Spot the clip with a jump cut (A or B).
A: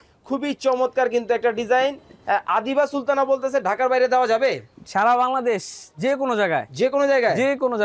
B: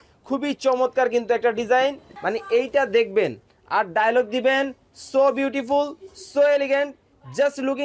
B